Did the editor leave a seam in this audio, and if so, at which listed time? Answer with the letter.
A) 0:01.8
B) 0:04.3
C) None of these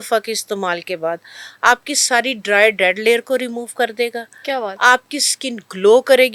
C